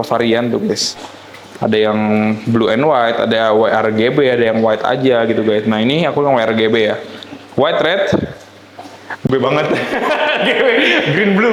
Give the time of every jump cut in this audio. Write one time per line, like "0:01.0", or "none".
none